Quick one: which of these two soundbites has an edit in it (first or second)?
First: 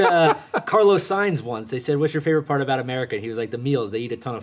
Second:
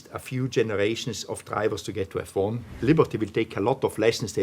second